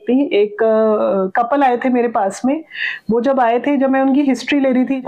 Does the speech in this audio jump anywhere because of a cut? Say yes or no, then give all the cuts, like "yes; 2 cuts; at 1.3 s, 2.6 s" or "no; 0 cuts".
no; 0 cuts